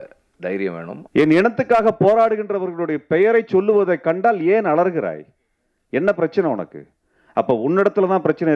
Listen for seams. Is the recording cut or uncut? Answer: cut